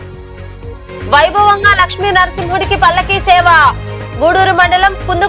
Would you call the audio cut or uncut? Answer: cut